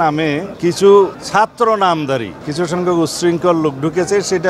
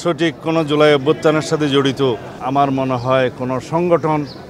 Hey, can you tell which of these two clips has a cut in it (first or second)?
first